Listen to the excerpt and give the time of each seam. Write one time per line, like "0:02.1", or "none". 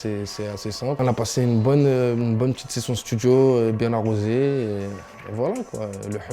0:01.0